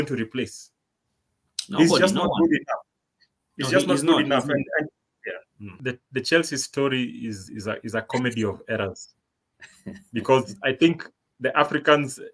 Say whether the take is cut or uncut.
cut